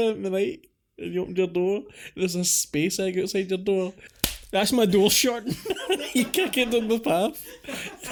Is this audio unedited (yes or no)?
yes